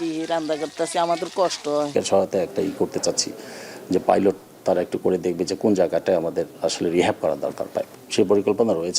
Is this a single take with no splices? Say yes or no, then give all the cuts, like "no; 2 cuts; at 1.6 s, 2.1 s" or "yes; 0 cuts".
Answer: no; 2 cuts; at 1.9 s, 8.0 s